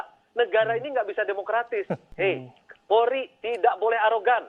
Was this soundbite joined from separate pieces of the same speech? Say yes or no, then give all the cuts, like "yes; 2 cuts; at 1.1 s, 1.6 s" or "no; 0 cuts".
yes; 1 cut; at 2.0 s